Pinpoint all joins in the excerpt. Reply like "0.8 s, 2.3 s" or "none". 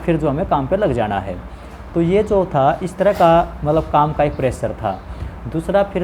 none